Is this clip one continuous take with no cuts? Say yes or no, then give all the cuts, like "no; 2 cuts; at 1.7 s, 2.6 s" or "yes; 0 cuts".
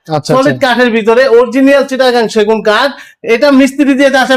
yes; 0 cuts